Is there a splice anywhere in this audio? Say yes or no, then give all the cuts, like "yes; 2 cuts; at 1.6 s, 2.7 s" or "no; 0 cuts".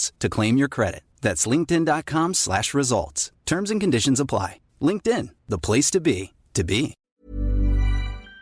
yes; 1 cut; at 7.0 s